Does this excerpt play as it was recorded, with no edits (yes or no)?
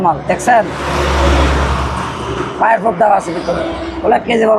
yes